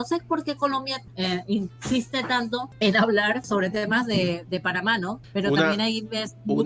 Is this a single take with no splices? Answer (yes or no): no